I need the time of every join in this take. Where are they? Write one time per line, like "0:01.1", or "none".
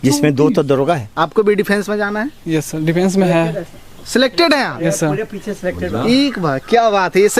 0:01.1